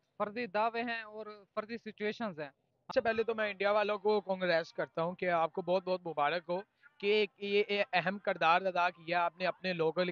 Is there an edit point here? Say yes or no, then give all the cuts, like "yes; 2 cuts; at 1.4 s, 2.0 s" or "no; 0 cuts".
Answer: yes; 1 cut; at 2.9 s